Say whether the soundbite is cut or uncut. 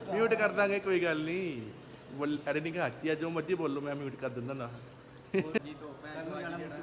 cut